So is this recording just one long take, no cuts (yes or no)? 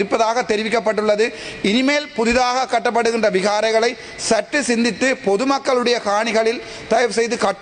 yes